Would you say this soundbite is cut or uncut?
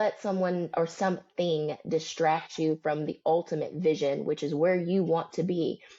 uncut